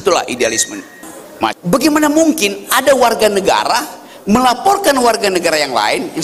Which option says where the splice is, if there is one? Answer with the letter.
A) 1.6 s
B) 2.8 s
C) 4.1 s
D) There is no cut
A